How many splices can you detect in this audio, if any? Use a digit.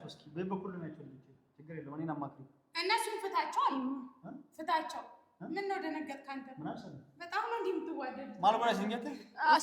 0